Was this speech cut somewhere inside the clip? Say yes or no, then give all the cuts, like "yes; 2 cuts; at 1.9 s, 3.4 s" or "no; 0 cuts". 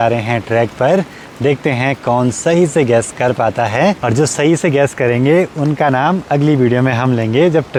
no; 0 cuts